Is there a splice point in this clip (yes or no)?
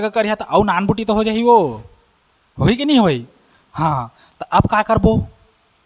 no